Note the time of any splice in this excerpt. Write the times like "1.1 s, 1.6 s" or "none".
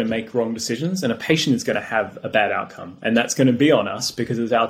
none